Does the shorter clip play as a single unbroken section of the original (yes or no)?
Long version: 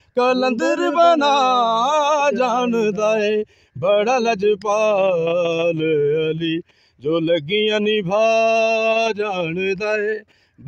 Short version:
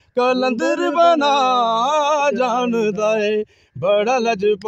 yes